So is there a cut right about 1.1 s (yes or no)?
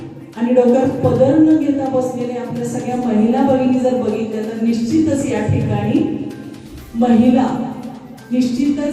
no